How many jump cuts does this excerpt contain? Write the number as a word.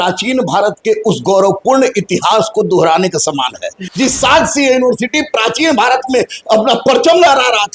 one